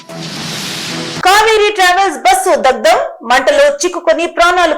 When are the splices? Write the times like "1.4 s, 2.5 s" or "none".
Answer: 1.2 s